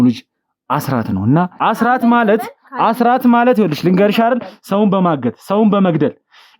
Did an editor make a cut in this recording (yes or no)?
yes